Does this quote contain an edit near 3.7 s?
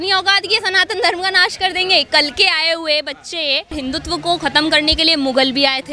yes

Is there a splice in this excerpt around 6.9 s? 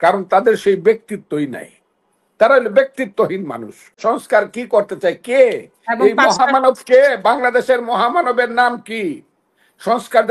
no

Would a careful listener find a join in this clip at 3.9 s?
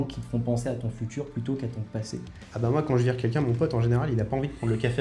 no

